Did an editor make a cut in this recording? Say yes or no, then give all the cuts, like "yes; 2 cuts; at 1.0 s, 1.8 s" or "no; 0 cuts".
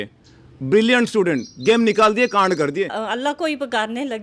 yes; 1 cut; at 3.0 s